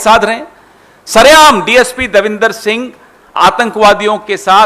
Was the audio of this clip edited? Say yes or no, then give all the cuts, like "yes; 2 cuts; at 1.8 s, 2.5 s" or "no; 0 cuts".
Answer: no; 0 cuts